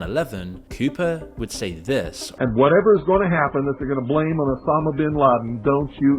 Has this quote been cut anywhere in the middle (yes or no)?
yes